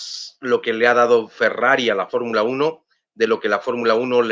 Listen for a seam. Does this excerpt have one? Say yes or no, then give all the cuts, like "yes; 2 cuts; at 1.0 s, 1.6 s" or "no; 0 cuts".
no; 0 cuts